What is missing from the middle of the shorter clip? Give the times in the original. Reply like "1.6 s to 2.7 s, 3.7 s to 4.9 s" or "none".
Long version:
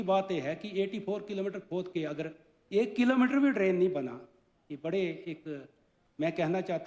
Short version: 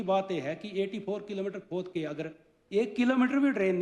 none